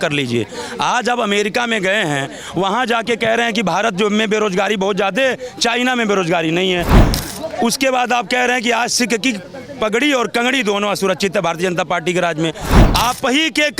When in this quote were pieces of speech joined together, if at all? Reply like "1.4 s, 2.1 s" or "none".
12.8 s